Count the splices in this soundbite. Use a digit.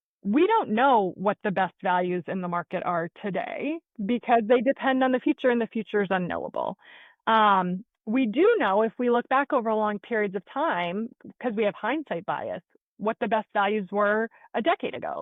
0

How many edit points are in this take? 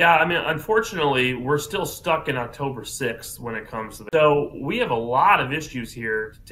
0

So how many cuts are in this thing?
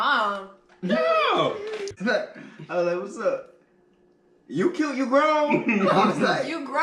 1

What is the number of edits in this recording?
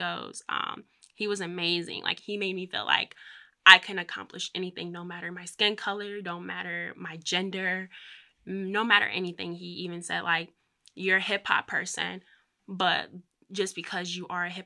1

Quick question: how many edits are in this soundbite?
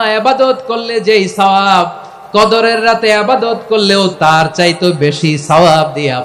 1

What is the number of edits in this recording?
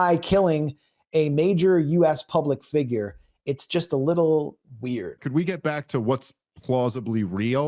1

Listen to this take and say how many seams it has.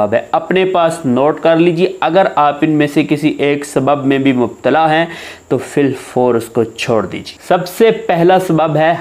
0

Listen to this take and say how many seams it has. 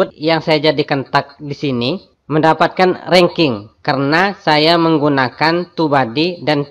1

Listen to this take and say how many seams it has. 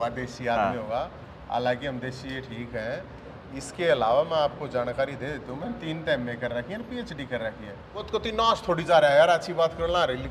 1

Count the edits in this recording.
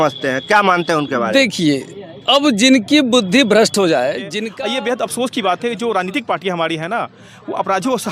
1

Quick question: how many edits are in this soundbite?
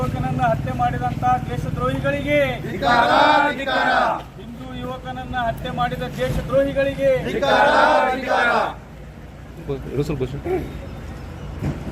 1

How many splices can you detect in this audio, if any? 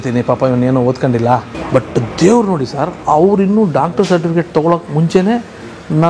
2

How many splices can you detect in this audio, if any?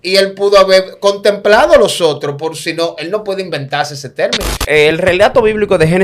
1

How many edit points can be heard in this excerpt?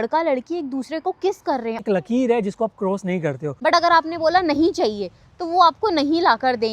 2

